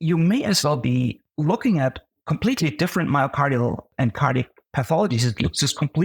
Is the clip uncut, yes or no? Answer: no